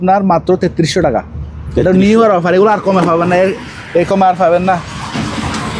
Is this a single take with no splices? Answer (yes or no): yes